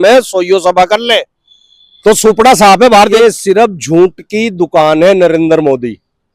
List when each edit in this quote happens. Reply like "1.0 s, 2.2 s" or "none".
3.2 s